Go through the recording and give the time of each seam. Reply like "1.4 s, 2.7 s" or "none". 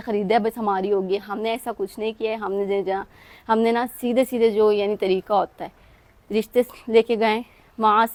none